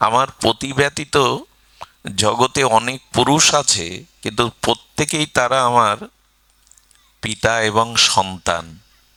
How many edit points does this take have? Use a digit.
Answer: 0